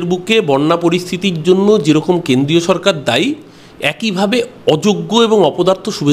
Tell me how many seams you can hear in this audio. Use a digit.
0